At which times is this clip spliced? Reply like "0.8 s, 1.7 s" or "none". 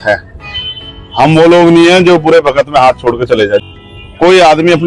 3.6 s